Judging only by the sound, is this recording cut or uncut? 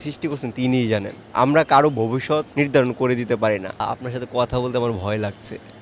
cut